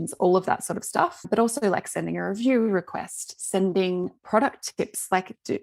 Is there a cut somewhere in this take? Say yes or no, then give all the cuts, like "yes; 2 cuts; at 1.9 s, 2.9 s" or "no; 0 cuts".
no; 0 cuts